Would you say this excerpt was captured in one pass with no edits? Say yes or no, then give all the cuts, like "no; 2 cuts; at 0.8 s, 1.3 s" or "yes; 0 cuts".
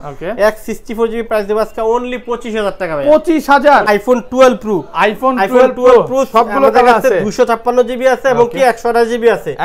no; 1 cut; at 3.9 s